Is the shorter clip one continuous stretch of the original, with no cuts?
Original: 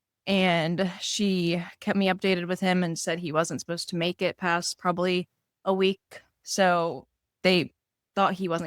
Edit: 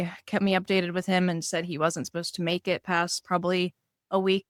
yes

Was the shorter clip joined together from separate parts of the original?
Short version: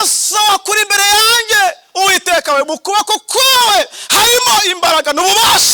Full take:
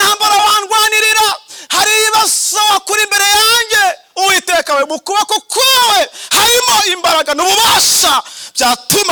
no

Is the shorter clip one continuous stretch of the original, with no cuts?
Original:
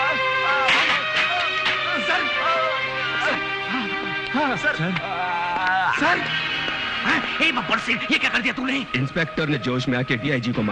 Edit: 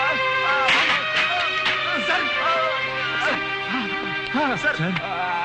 yes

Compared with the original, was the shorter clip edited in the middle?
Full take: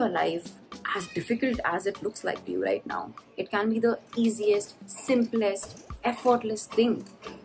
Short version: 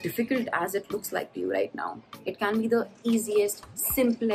no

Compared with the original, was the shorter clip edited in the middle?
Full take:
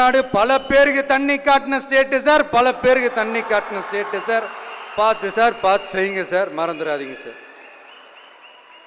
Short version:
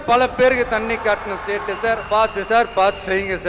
yes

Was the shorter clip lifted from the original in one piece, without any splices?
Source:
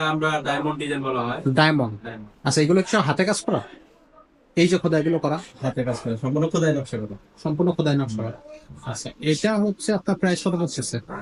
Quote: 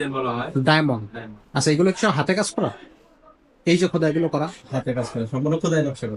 yes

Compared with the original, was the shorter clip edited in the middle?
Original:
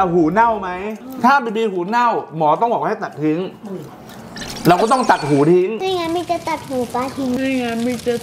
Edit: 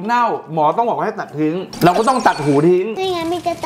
yes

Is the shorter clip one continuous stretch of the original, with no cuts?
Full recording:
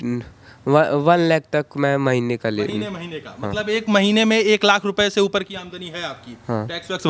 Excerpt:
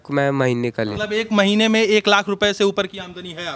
no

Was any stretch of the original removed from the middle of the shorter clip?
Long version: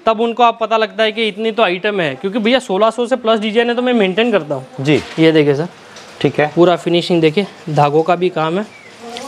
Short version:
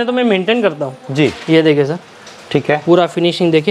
no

